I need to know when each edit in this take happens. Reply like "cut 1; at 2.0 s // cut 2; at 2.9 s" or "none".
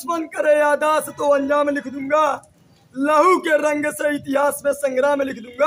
none